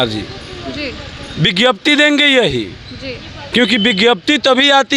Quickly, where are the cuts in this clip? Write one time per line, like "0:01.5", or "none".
none